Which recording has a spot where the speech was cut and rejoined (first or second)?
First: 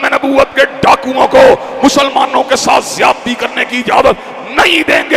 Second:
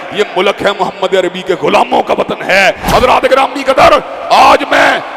second